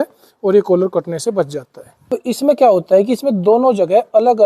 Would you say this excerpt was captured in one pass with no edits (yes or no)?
no